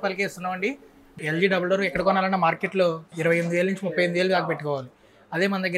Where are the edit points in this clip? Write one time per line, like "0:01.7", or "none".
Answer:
0:01.2
0:03.1